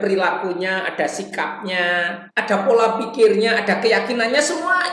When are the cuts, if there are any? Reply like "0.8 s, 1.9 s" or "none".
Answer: 2.2 s